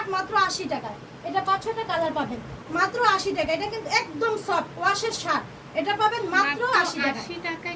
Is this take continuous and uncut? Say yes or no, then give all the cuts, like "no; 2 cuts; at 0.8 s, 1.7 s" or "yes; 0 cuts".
yes; 0 cuts